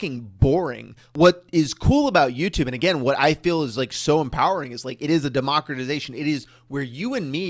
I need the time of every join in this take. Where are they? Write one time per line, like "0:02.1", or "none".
0:01.0